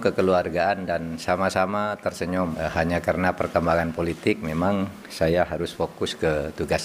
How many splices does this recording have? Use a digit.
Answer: 1